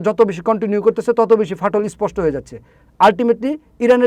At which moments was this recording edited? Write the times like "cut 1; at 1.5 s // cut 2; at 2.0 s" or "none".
none

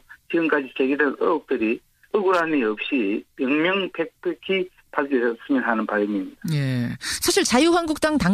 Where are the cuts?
cut 1; at 6.1 s

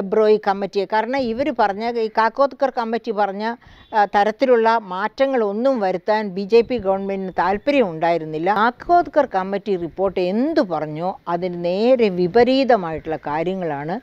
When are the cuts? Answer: cut 1; at 8.6 s

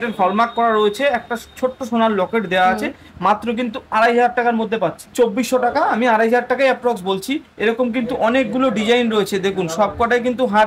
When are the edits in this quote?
none

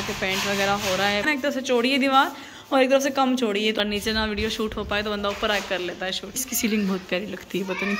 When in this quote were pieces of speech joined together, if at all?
cut 1; at 1.2 s // cut 2; at 3.8 s // cut 3; at 6.4 s

